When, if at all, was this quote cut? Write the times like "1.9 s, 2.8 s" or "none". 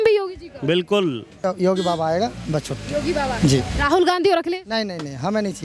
1.4 s